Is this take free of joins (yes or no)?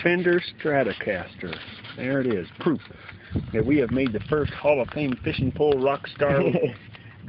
yes